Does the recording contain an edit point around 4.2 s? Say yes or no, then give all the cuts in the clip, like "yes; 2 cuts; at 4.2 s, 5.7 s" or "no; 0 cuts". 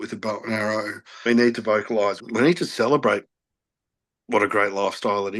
no; 2 cuts; at 1.2 s, 2.2 s